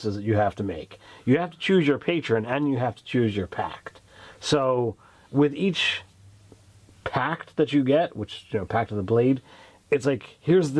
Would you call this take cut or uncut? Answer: uncut